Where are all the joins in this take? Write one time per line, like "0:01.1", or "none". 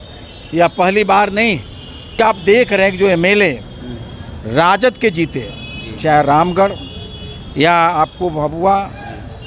0:02.2